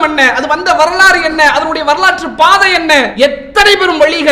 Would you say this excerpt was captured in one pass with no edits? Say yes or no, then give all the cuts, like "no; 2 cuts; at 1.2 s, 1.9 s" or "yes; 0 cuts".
no; 1 cut; at 3.1 s